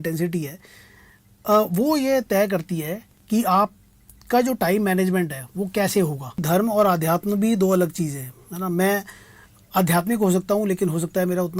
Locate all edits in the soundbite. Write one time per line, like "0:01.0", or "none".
0:06.4